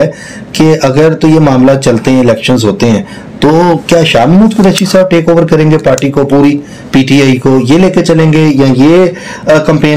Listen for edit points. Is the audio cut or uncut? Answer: uncut